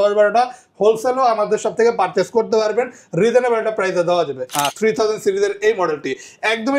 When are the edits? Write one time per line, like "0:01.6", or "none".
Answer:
0:04.7